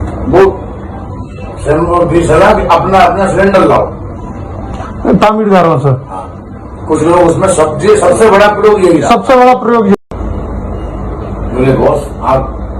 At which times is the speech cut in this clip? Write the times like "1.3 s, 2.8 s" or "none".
9.9 s

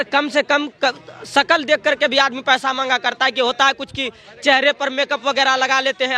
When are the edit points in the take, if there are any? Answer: none

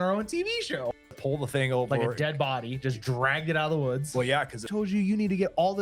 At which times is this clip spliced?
1.1 s, 4.7 s

